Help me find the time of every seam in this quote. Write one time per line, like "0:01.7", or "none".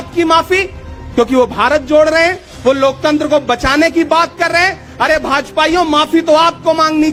none